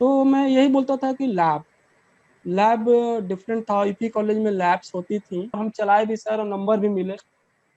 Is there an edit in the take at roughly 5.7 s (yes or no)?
yes